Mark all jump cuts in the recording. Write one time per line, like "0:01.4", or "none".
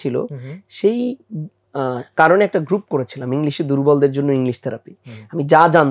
none